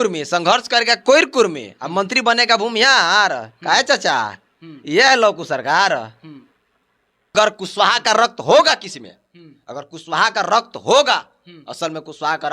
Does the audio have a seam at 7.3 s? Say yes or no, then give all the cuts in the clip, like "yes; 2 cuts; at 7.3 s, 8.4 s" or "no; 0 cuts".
yes; 1 cut; at 7.3 s